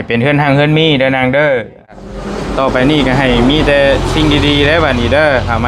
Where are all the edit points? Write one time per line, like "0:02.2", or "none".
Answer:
0:02.0